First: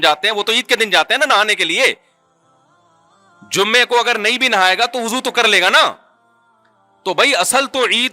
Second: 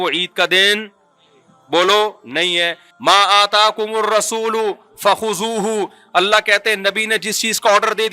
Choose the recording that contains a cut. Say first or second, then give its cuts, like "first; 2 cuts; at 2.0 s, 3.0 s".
second; 1 cut; at 2.8 s